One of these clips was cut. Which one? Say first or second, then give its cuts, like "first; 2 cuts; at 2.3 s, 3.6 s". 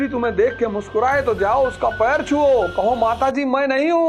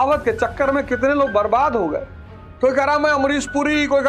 second; 1 cut; at 2.2 s